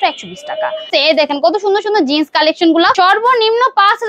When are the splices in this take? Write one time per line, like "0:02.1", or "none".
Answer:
0:00.9
0:02.9